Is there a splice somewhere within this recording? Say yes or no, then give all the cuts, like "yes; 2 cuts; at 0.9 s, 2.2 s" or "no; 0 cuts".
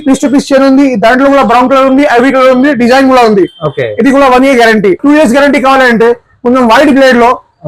yes; 1 cut; at 5.0 s